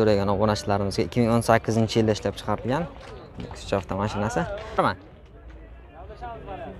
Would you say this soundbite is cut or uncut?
cut